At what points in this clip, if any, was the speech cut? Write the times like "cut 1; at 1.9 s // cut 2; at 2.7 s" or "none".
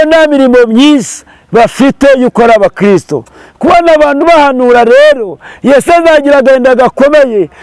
none